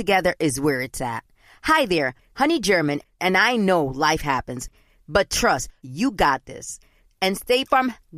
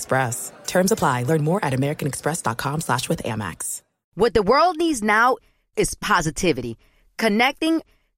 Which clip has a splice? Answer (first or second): second